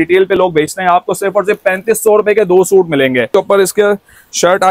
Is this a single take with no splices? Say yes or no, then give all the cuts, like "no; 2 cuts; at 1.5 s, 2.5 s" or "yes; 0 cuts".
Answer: no; 1 cut; at 3.3 s